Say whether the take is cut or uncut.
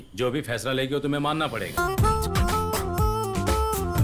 cut